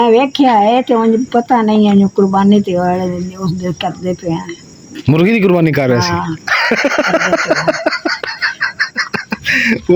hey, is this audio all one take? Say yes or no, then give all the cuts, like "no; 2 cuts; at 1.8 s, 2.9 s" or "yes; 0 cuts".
yes; 0 cuts